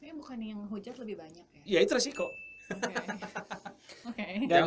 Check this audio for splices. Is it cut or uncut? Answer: uncut